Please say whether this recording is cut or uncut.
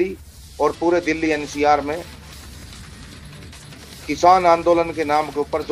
uncut